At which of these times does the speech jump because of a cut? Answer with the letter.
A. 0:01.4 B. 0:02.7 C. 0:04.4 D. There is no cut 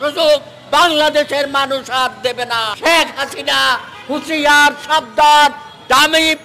B